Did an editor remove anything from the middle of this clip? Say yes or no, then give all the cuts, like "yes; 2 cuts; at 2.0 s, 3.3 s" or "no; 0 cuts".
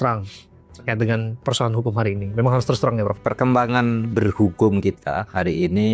no; 0 cuts